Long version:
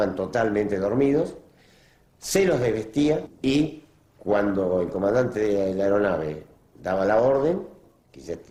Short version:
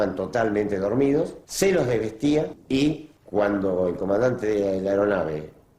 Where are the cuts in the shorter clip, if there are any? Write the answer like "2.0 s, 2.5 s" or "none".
1.4 s, 3.1 s